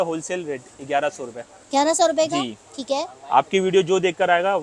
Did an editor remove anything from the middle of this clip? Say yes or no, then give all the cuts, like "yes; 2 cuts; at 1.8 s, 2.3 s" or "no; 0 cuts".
no; 0 cuts